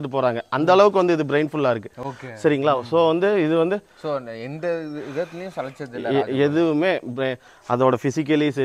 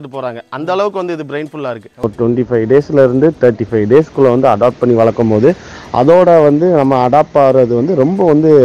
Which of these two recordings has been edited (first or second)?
second